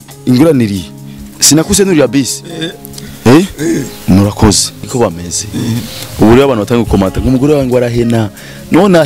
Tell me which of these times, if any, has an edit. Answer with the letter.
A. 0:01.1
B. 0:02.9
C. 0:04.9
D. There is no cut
C